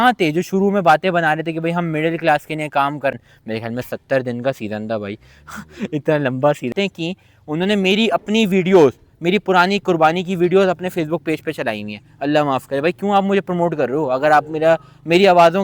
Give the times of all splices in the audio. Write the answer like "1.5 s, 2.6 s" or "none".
3.1 s, 6.7 s